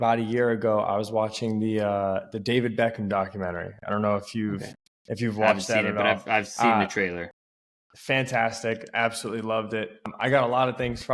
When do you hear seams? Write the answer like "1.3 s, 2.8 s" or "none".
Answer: 10.1 s